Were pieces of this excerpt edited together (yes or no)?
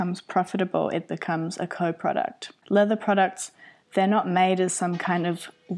yes